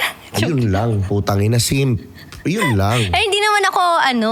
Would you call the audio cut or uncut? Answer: uncut